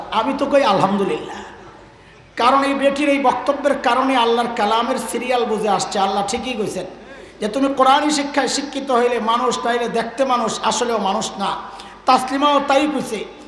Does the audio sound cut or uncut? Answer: uncut